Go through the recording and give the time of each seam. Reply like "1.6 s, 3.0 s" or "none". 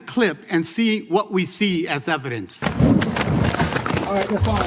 2.5 s